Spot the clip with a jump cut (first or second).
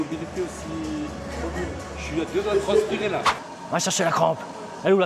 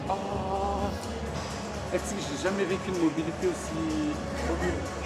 first